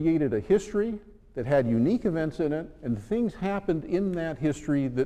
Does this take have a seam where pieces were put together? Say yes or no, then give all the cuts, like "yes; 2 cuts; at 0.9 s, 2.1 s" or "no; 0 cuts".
yes; 1 cut; at 3.0 s